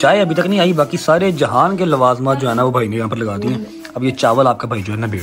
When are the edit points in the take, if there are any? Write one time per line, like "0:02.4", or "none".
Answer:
none